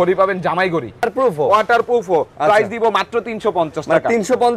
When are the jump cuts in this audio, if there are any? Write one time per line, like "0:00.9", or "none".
0:01.1